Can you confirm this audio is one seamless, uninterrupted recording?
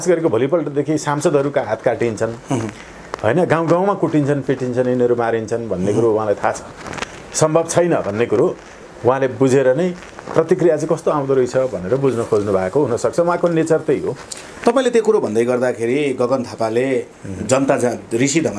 yes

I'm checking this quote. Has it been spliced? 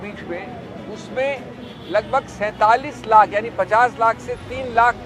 no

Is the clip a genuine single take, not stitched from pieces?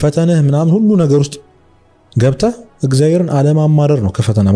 yes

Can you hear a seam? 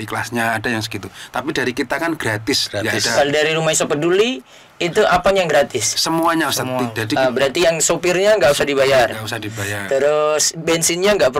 no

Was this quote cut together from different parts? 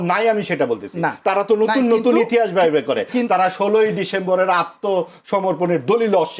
no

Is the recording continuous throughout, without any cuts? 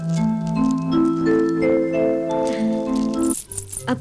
yes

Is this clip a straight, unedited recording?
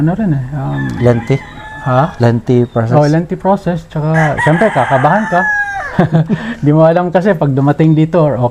yes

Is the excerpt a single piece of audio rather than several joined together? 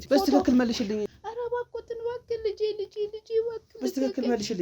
no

